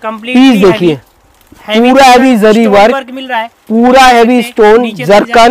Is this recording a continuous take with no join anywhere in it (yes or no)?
yes